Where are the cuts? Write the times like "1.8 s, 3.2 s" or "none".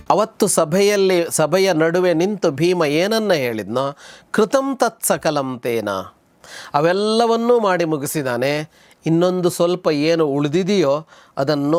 none